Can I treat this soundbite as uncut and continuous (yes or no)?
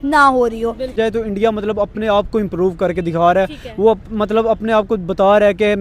no